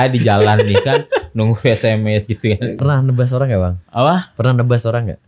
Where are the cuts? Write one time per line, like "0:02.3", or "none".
0:02.8